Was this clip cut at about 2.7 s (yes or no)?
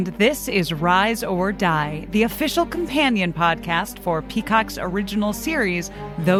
no